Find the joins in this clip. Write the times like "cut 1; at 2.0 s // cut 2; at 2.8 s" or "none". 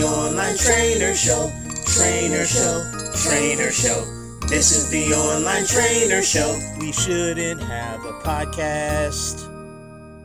none